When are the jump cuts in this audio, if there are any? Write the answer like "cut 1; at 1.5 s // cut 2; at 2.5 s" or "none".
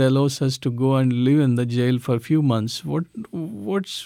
none

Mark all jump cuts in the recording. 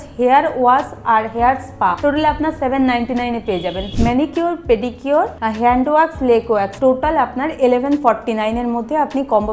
cut 1; at 2.0 s // cut 2; at 3.8 s // cut 3; at 5.4 s // cut 4; at 6.7 s

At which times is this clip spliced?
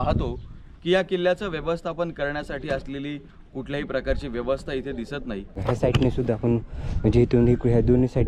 cut 1; at 5.6 s

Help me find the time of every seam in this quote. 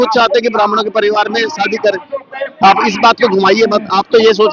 none

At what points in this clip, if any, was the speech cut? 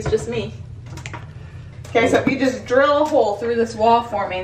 cut 1; at 1.7 s

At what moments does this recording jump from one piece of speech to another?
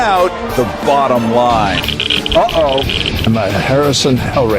cut 1; at 1.4 s

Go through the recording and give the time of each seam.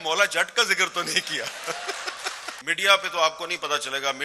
cut 1; at 2.5 s

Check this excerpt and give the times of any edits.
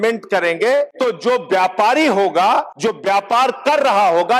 cut 1; at 0.9 s // cut 2; at 2.7 s

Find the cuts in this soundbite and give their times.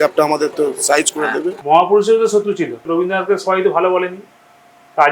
cut 1; at 1.6 s // cut 2; at 2.8 s

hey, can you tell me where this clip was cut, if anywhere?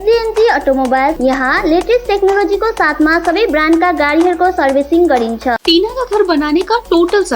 cut 1; at 1.2 s // cut 2; at 5.6 s

